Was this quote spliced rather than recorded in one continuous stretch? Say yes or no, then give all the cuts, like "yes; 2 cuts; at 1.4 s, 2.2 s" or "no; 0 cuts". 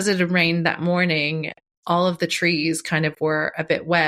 yes; 1 cut; at 1.6 s